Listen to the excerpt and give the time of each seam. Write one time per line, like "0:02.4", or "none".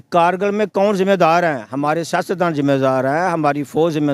none